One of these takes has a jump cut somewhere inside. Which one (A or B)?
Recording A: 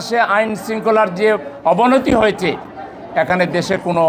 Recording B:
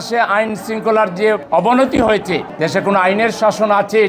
B